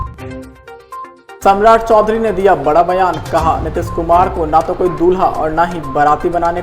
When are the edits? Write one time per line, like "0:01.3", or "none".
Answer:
0:00.9